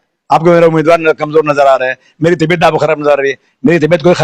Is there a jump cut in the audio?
no; 0 cuts

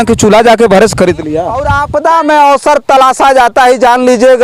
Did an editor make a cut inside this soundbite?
yes; 1 cut; at 1.7 s

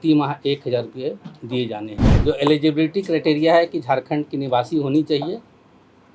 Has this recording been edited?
yes; 1 cut; at 2.0 s

